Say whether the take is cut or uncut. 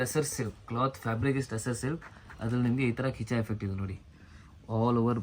uncut